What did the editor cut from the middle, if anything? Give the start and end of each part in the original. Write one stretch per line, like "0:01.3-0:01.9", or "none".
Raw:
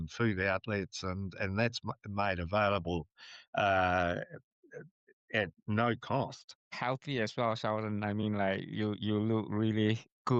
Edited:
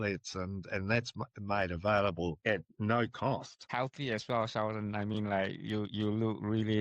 0:03.1-0:05.3
0:06.4-0:06.6